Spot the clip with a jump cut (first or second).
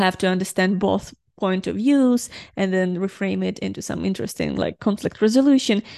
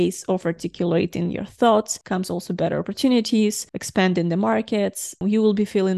second